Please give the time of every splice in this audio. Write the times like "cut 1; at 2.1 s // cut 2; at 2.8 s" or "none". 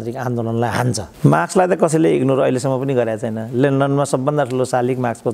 cut 1; at 1.1 s